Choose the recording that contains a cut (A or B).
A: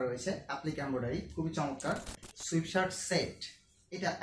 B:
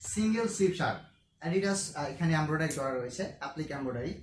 A